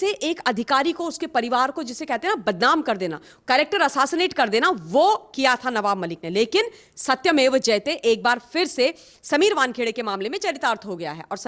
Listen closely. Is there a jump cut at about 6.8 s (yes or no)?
no